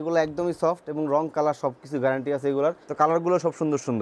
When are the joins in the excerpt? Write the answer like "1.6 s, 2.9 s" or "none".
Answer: 2.8 s